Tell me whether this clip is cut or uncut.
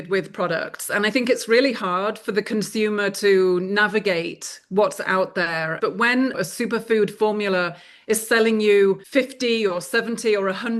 cut